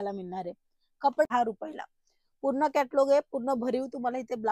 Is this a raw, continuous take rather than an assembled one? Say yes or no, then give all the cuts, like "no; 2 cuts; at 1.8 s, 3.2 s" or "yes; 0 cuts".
no; 1 cut; at 1.2 s